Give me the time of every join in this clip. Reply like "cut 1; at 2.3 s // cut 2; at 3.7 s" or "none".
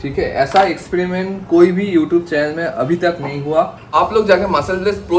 cut 1; at 3.9 s